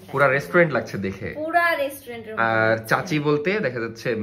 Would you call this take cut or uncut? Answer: uncut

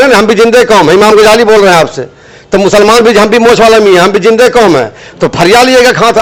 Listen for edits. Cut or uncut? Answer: uncut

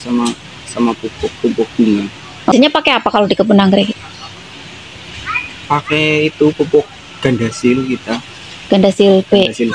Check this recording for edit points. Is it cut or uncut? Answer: cut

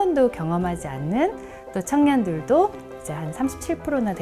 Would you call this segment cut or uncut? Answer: uncut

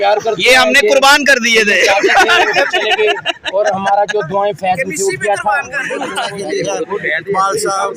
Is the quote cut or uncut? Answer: cut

